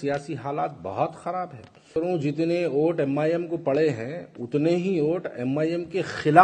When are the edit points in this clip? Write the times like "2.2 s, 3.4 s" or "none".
1.9 s